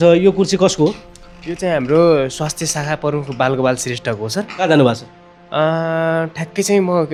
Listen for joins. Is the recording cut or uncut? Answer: uncut